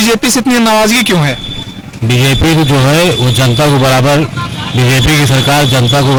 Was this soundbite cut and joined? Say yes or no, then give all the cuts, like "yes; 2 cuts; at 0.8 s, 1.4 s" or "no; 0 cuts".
no; 0 cuts